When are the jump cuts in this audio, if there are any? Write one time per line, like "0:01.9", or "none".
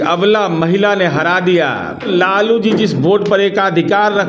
0:02.1